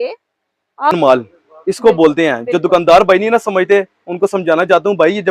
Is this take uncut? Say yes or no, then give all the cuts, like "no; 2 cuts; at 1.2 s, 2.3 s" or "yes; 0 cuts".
no; 1 cut; at 0.9 s